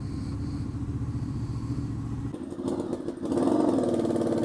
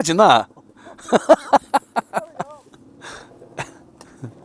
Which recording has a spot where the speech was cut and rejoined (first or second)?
first